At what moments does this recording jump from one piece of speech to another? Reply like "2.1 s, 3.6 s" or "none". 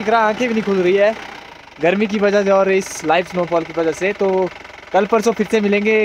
none